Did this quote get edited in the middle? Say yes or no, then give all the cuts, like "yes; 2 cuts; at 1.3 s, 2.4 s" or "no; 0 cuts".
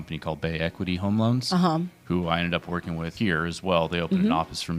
yes; 1 cut; at 3.1 s